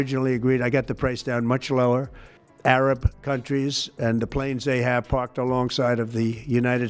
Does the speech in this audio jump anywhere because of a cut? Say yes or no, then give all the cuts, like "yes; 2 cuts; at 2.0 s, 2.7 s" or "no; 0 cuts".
yes; 1 cut; at 2.5 s